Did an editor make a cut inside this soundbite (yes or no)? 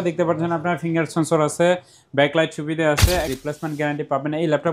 yes